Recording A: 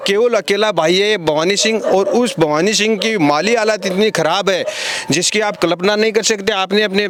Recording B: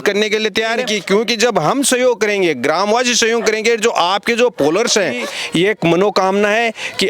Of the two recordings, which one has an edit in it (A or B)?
B